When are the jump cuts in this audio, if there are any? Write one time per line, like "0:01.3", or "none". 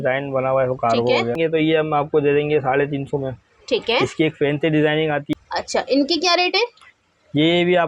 0:01.4
0:05.3